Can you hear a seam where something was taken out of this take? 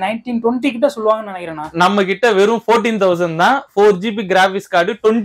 no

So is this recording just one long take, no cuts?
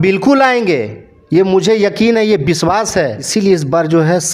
no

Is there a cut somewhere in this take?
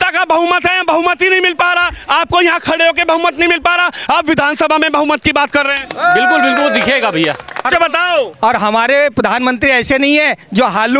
yes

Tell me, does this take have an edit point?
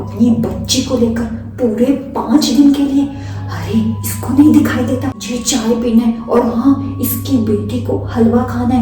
yes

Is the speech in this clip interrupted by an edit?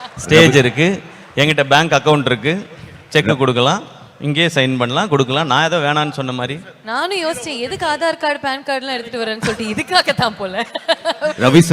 no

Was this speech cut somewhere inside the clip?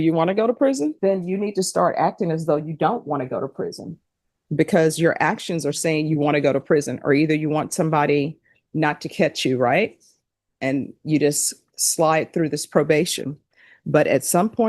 yes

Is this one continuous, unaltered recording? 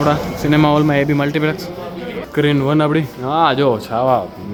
yes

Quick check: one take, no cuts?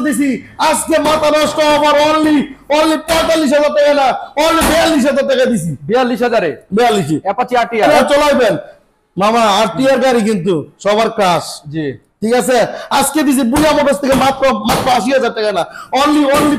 no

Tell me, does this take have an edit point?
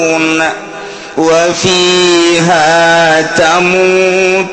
no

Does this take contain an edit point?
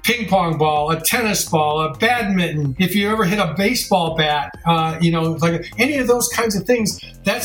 yes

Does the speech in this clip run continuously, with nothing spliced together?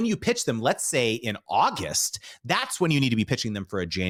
yes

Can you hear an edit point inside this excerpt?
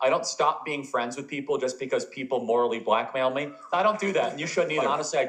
yes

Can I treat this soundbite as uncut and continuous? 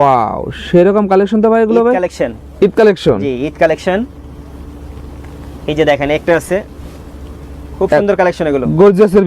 yes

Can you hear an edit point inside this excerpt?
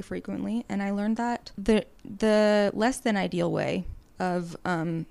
no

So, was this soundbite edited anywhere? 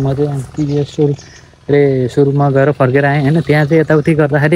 no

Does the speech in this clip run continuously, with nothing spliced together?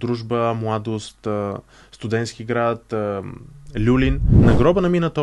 no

